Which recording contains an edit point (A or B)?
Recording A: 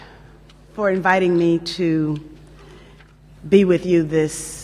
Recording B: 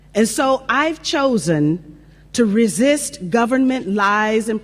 A